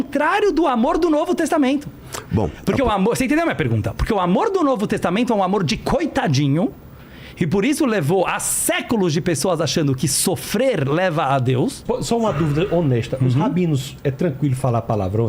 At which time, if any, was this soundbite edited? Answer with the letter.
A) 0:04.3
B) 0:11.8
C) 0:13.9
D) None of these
B